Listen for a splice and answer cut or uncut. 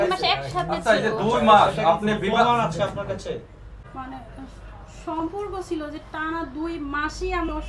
cut